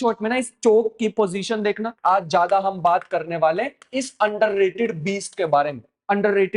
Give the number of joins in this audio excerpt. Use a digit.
1